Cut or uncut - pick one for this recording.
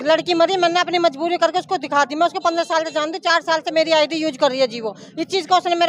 uncut